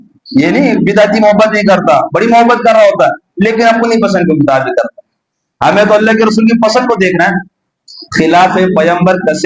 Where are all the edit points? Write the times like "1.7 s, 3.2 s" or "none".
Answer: none